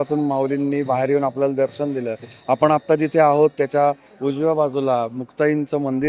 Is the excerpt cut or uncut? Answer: uncut